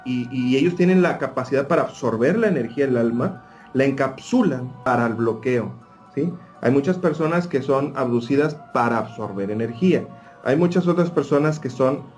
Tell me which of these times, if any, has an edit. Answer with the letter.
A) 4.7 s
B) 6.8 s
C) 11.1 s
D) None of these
A